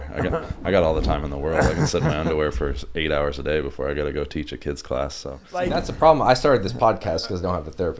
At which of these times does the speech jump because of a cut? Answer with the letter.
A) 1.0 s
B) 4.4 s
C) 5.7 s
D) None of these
C